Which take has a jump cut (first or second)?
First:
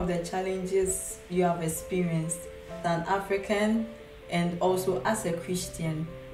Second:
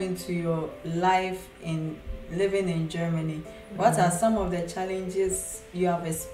first